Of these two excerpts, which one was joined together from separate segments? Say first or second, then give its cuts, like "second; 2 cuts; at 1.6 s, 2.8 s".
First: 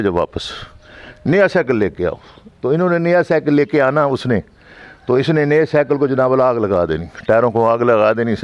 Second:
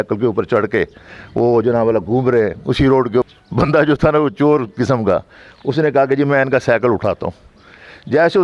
second; 1 cut; at 3.3 s